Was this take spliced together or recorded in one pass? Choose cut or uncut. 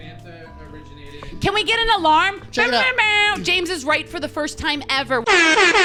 uncut